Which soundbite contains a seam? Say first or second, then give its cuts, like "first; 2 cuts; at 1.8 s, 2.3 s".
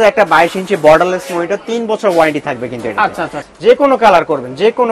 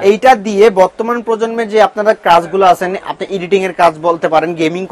first; 1 cut; at 3.5 s